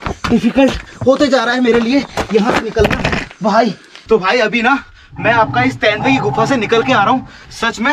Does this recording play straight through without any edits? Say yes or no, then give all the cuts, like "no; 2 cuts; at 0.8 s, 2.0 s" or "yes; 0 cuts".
no; 1 cut; at 3.9 s